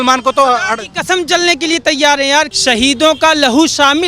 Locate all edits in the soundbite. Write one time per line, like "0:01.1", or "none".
0:02.5